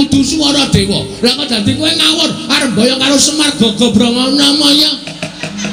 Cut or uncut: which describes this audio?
uncut